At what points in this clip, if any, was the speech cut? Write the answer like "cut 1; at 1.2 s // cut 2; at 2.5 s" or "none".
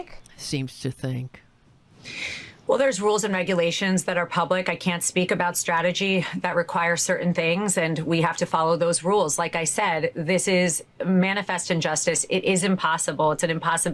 cut 1; at 11.6 s // cut 2; at 12.8 s